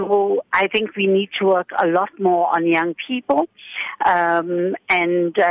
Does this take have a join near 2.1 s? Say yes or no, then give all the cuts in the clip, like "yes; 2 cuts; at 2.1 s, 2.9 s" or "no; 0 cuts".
no; 0 cuts